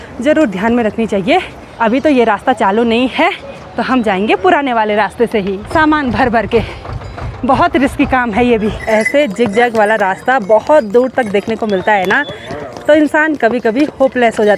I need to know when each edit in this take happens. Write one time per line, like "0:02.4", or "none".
0:01.6
0:05.6
0:08.8

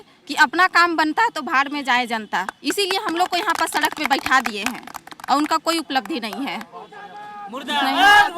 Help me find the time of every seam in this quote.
none

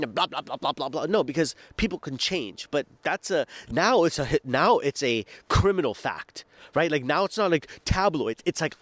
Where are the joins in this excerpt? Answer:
none

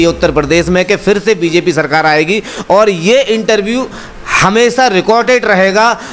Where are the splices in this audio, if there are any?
none

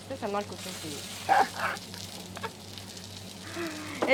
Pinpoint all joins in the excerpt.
none

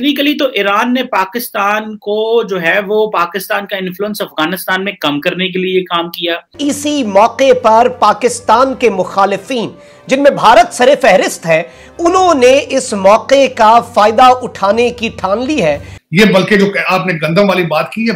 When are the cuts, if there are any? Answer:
0:06.5
0:15.9

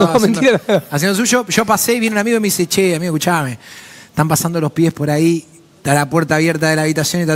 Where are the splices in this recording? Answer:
none

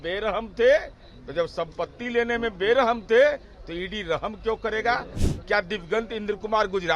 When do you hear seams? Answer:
0:05.2

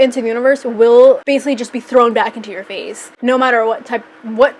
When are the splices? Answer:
none

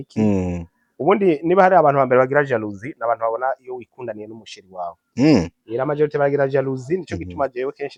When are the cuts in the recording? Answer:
none

